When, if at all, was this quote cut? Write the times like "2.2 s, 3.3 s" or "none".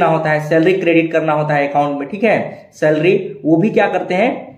none